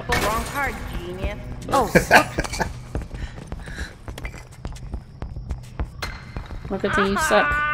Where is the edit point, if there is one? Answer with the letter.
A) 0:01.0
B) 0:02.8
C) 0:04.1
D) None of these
C